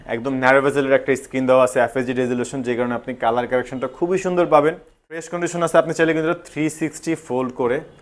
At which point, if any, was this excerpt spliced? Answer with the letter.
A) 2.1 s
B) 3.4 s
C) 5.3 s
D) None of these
C